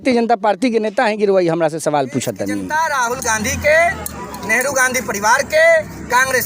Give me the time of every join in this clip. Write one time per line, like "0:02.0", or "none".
0:02.6